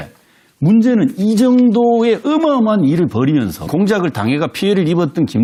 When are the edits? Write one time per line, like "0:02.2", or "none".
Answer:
none